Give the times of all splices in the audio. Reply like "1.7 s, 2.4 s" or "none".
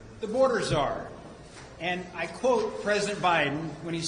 1.7 s